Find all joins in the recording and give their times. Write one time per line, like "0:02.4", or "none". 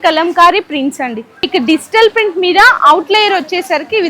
0:01.4